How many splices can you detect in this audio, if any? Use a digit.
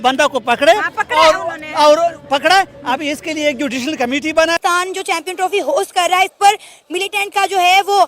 1